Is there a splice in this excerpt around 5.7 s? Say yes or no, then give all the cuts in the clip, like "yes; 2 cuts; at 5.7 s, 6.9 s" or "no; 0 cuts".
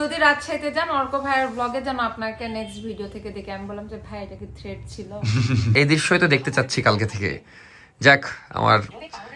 yes; 1 cut; at 5.7 s